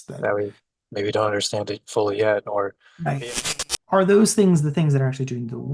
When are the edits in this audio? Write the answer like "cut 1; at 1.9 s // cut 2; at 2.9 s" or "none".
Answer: cut 1; at 3.2 s